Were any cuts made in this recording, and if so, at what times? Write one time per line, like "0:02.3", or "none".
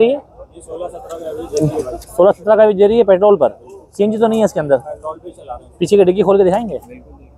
none